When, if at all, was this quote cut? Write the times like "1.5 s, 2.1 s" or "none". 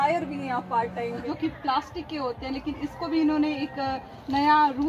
1.2 s